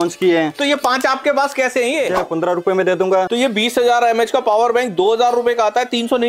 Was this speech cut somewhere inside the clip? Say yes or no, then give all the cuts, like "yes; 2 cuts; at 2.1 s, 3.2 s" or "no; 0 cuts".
yes; 2 cuts; at 2.2 s, 3.3 s